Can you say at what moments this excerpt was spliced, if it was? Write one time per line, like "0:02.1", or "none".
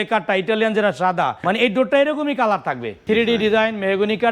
0:01.4
0:02.9